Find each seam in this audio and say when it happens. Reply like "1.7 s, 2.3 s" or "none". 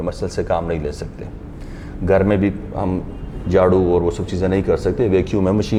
none

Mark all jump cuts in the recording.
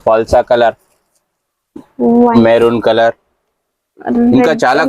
2.3 s

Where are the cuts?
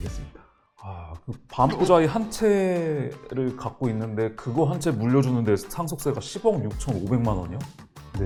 none

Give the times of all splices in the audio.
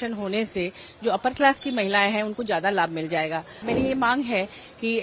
3.7 s

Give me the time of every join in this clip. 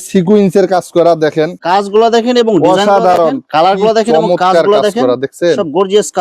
3.4 s

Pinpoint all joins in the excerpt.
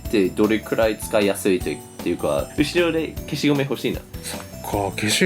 2.5 s

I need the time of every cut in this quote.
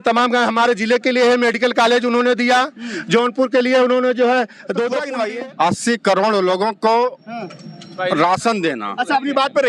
5.1 s

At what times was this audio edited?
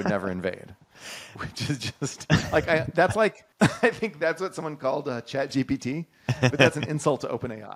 3.4 s

